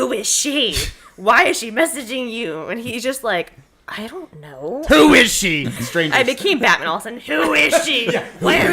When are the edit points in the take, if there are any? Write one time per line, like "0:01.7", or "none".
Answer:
0:04.8
0:05.8